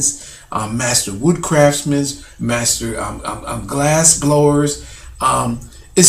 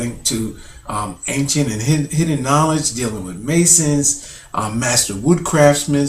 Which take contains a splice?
first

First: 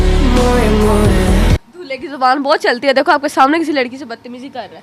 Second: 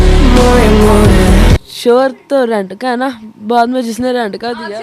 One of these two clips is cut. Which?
second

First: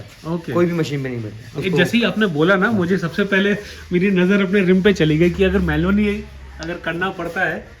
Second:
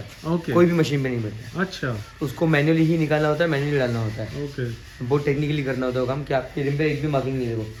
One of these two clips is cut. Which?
first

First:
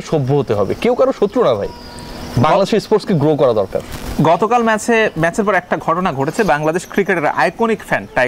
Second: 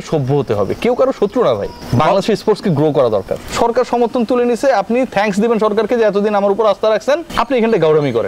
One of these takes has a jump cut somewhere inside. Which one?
second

